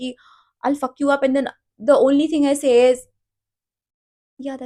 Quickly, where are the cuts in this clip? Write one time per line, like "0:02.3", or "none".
none